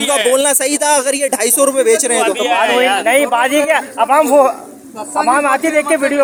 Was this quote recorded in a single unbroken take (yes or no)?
yes